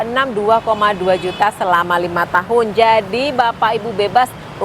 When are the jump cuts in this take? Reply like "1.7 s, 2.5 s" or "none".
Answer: none